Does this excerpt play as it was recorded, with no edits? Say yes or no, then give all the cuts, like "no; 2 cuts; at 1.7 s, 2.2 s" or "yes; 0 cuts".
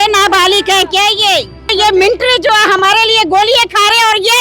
no; 1 cut; at 1.7 s